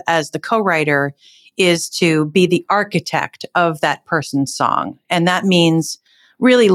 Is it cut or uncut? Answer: uncut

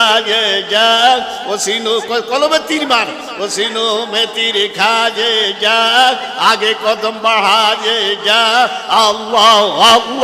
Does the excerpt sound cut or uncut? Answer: uncut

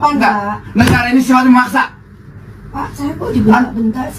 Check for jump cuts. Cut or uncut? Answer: uncut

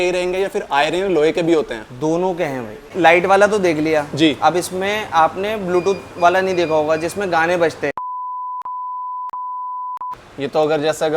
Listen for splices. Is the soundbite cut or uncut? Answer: cut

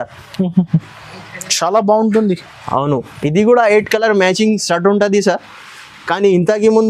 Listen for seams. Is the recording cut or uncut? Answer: uncut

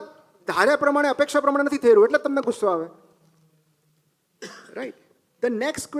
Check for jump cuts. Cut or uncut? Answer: uncut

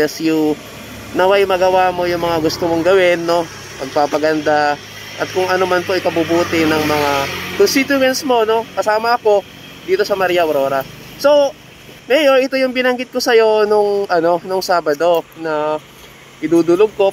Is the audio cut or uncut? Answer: uncut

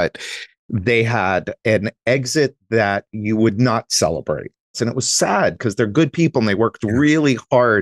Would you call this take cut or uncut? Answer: cut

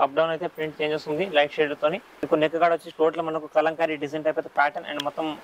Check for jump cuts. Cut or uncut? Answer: cut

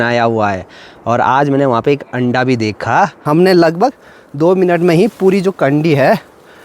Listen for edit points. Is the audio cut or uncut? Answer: cut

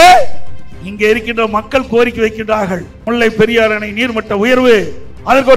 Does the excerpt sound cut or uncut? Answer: cut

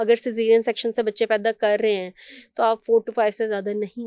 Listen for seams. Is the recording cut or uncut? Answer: uncut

